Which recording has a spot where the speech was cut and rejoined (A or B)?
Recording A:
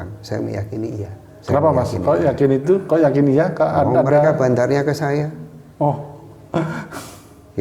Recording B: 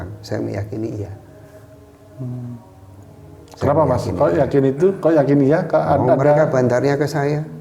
A